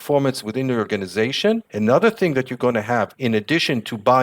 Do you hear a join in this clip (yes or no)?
yes